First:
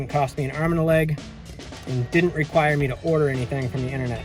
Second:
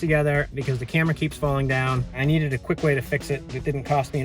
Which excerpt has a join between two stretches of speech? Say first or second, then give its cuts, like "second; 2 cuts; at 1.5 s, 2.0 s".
second; 1 cut; at 2.2 s